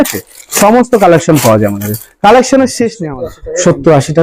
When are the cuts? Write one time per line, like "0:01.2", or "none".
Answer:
0:03.0